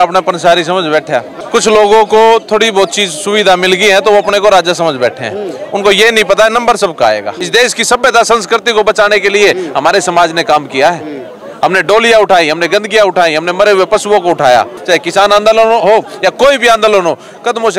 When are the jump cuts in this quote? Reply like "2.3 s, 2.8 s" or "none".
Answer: 1.4 s, 7.4 s, 14.8 s

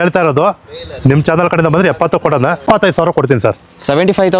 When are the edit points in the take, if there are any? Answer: 2.6 s

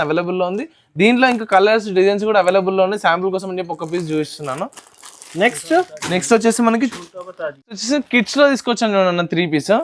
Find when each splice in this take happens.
none

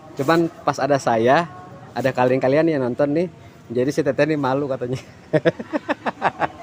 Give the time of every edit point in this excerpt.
none

